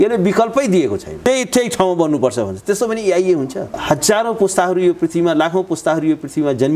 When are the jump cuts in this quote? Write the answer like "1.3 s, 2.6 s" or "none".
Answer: 1.2 s, 3.7 s